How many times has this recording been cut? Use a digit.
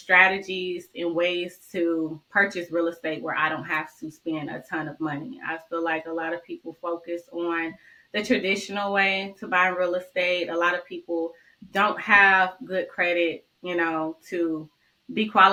0